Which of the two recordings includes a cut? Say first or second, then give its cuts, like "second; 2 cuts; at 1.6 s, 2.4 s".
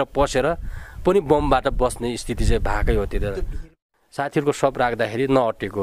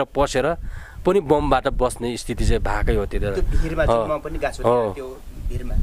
first; 1 cut; at 3.8 s